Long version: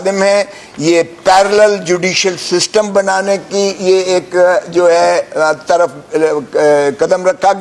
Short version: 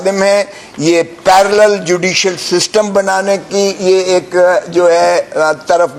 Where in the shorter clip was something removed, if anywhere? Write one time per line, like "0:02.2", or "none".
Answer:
none